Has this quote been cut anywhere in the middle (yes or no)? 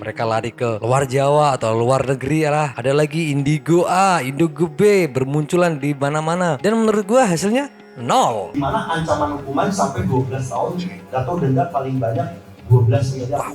yes